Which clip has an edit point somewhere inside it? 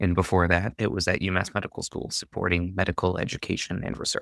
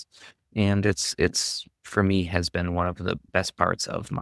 second; 1 cut; at 3.2 s

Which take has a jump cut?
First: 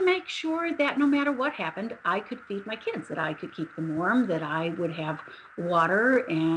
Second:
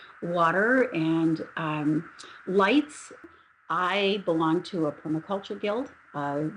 second; 1 cut; at 3.3 s

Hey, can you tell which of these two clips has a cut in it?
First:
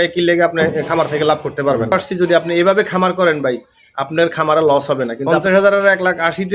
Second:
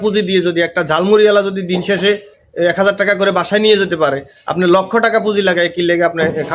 first; 2 cuts; at 1.9 s, 5.2 s

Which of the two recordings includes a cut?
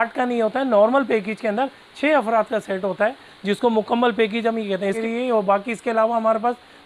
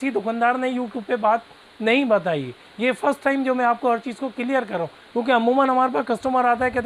first; 1 cut; at 5.0 s

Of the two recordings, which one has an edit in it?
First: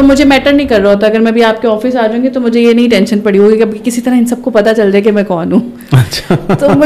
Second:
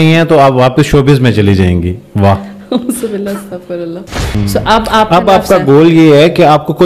second; 1 cut; at 4.4 s

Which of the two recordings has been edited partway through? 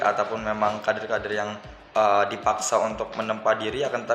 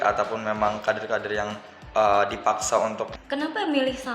second; 1 cut; at 3.1 s

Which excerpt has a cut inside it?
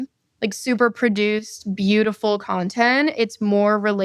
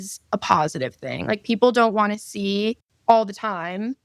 second; 1 cut; at 2.9 s

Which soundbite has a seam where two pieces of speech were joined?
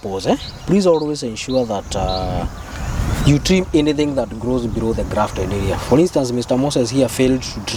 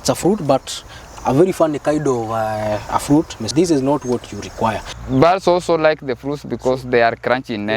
second; 2 cuts; at 3.5 s, 4.9 s

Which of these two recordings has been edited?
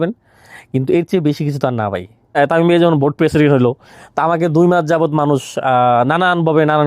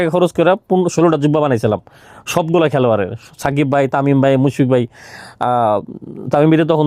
first; 1 cut; at 2.3 s

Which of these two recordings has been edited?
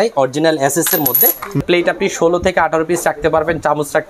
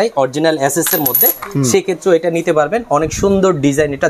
first; 1 cut; at 1.6 s

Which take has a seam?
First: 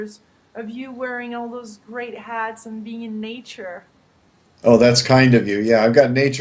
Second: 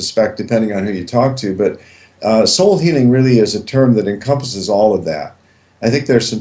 second; 1 cut; at 2.9 s

